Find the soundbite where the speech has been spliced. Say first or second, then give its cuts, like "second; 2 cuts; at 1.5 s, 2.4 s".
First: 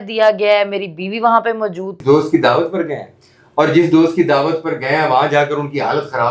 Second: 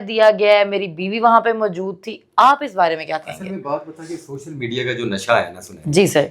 first; 1 cut; at 2.0 s